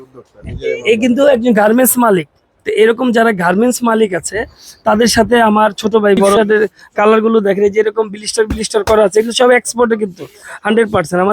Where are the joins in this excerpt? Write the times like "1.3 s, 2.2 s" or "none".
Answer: 6.4 s

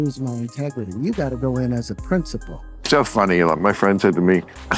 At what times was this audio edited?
2.7 s

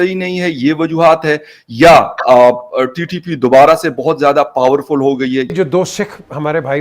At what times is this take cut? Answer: 5.5 s

